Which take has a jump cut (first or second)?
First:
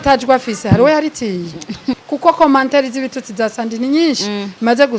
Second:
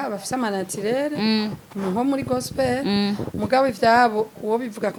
first